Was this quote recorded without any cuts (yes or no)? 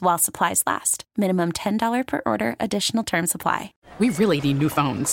no